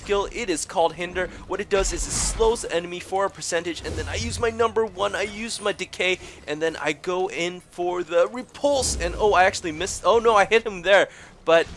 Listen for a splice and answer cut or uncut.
uncut